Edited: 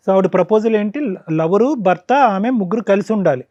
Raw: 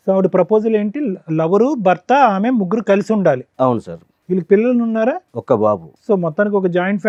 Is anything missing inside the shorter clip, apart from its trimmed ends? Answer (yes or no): no